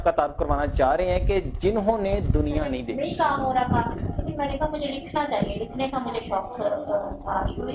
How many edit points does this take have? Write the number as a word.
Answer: one